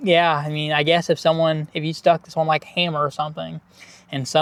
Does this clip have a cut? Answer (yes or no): no